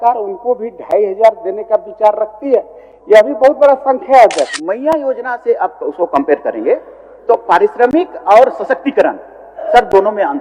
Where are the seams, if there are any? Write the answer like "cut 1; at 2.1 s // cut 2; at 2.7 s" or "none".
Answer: cut 1; at 4.6 s